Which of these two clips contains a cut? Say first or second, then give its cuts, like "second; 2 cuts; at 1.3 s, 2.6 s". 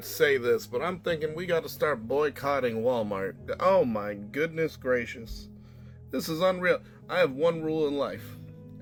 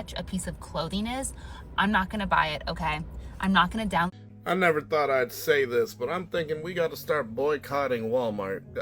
second; 1 cut; at 4.2 s